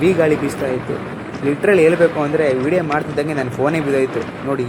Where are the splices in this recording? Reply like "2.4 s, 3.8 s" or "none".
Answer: none